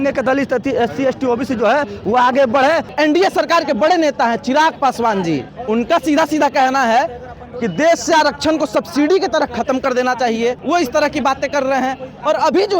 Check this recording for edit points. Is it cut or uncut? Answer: cut